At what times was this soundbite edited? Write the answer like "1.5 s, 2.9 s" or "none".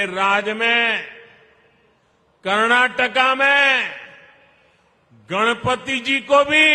none